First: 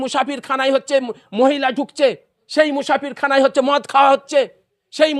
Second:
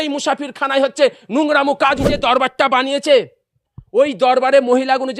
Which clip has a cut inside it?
second; 1 cut; at 2.0 s

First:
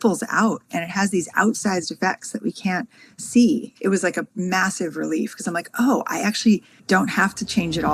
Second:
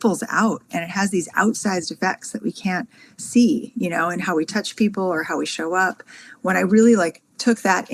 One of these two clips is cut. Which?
first; 2 cuts; at 3.7 s, 6.8 s

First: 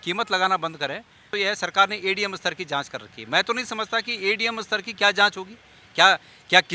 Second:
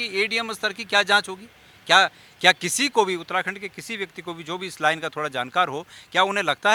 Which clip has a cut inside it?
first; 1 cut; at 1.3 s

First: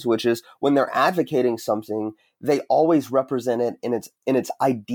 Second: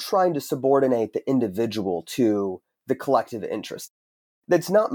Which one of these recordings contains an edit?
second; 1 cut; at 4.0 s

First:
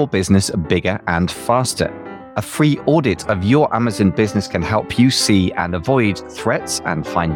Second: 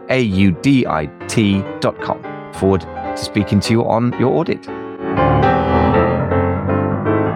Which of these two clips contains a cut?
second; 2 cuts; at 2.0 s, 5.1 s

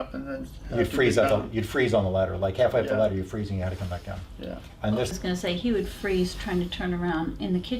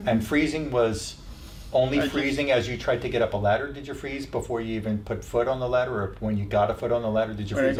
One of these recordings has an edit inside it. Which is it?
first; 1 cut; at 5.1 s

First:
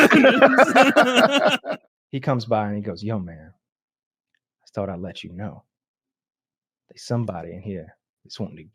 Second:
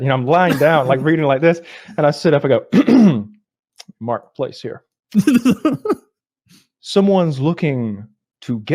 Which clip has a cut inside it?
first; 1 cut; at 1.6 s

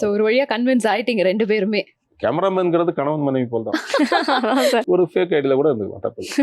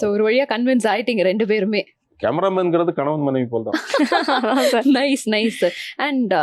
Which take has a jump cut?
first; 1 cut; at 4.8 s

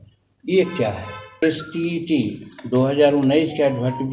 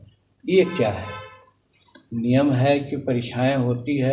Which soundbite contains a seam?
first; 1 cut; at 1.4 s

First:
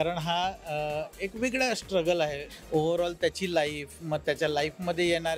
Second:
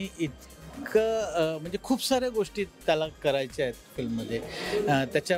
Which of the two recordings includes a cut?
first; 1 cut; at 2.5 s

